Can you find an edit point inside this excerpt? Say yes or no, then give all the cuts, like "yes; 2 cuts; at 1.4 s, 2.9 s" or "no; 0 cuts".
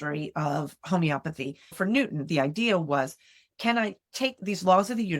yes; 2 cuts; at 1.8 s, 4.4 s